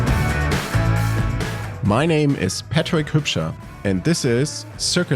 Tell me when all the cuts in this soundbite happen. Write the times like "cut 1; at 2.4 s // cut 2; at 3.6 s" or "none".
cut 1; at 1.1 s